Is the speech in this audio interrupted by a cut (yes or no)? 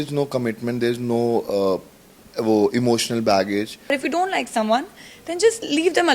yes